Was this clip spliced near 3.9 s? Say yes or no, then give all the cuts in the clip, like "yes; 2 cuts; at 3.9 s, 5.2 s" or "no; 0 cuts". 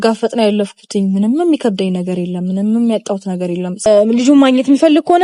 yes; 1 cut; at 3.9 s